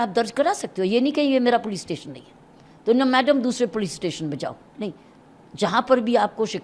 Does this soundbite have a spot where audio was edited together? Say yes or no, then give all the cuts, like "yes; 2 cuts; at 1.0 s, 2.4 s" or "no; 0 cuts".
no; 0 cuts